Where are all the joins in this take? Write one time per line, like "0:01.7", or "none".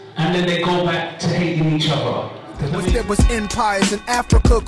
0:02.8